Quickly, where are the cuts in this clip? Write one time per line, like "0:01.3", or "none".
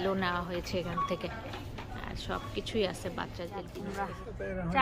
0:03.7